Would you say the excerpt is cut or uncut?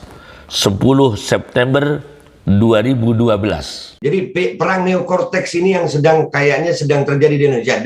cut